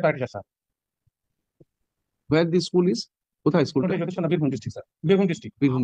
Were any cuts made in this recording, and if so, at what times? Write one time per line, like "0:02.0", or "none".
none